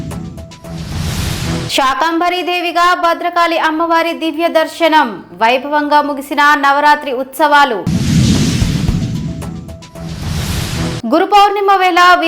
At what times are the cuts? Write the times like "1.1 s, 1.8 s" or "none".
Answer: 1.7 s